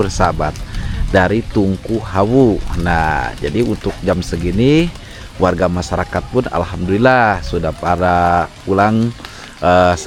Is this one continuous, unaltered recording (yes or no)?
yes